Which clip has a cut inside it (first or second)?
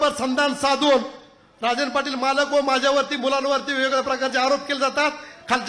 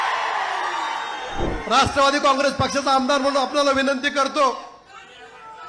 second